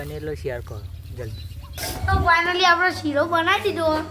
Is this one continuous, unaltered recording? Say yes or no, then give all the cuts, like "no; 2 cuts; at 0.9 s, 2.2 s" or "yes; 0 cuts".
no; 1 cut; at 1.9 s